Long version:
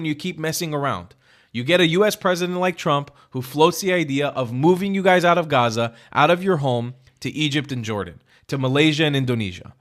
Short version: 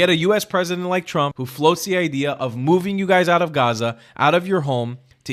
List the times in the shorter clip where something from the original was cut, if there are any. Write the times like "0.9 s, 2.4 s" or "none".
1.4 s